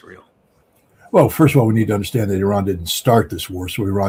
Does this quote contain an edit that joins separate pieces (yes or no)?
no